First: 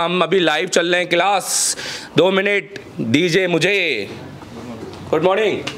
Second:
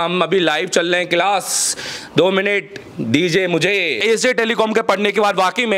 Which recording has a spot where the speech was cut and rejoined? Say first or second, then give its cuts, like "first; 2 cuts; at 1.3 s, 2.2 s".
second; 1 cut; at 4.0 s